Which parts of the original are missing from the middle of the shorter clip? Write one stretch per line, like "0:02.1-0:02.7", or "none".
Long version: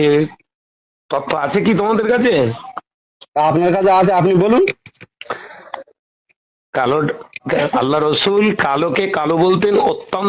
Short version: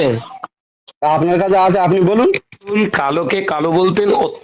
0:05.0-0:08.4

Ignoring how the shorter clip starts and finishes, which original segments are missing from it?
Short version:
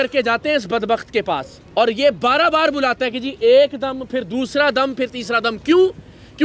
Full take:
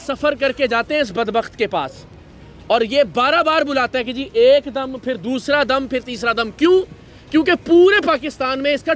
0:02.0-0:02.5

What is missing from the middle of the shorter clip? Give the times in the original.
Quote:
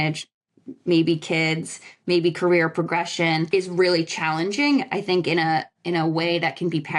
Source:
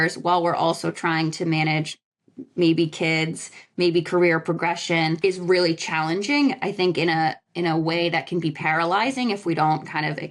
none

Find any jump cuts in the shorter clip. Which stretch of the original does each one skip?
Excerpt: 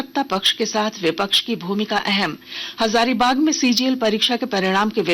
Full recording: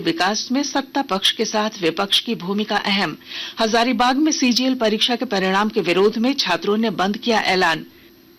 none

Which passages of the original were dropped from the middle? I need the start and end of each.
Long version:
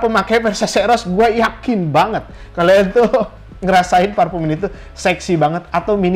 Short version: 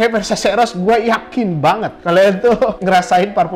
0:02.2-0:02.4
0:03.3-0:03.6

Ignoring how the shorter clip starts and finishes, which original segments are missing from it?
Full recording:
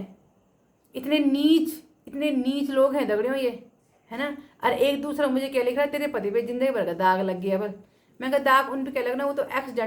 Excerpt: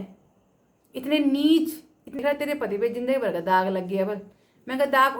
0:02.2-0:05.7

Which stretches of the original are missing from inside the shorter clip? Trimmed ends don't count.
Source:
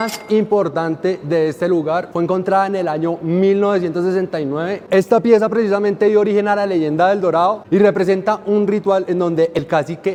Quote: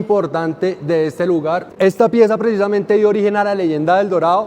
0:02.1-0:04.8

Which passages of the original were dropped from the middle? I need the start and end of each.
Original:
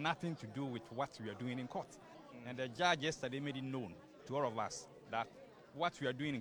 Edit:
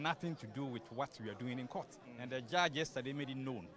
0:02.0-0:02.3

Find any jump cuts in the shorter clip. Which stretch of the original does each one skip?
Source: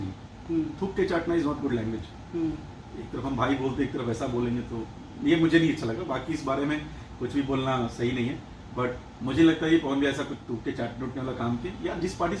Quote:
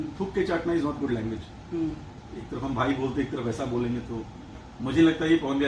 0:05.2-0:09.0

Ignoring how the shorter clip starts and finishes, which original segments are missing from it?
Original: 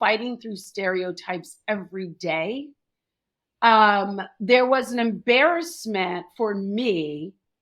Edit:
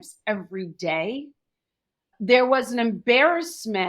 0:03.4-0:04.2

